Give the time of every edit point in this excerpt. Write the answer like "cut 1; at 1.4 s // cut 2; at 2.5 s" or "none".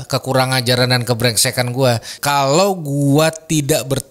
cut 1; at 2.1 s